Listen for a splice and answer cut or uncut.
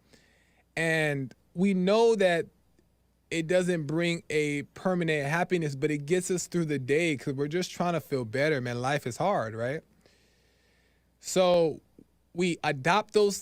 uncut